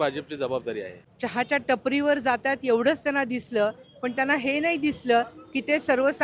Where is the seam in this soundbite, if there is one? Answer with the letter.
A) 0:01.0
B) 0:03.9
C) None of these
A